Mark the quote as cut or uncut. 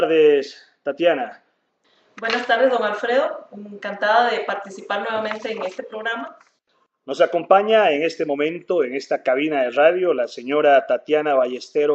cut